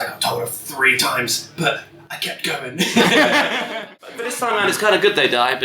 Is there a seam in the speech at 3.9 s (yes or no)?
yes